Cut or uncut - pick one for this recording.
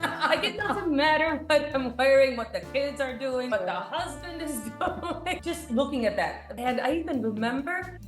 cut